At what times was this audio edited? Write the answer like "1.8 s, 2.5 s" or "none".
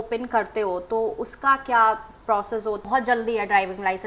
2.8 s